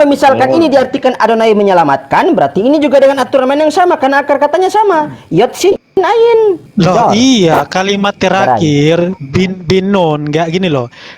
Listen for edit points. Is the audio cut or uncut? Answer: cut